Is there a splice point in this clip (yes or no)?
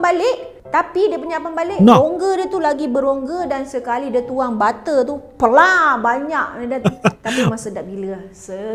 no